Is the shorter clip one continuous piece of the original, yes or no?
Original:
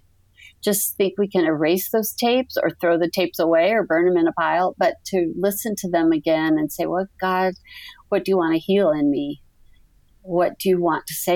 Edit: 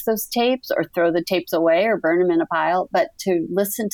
yes